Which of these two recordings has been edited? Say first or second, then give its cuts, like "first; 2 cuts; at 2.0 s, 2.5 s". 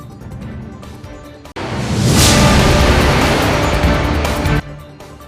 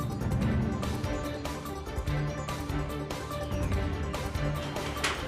second; 1 cut; at 1.1 s